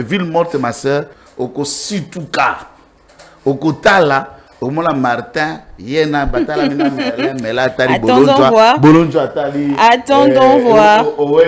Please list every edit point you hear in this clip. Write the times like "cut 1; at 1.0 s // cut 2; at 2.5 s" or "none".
cut 1; at 1.2 s